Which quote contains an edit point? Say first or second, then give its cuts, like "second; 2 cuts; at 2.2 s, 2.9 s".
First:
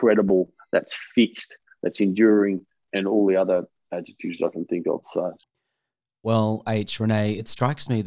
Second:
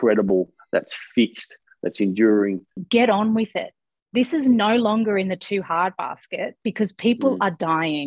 second; 1 cut; at 2.8 s